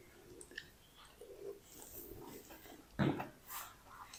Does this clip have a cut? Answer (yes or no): no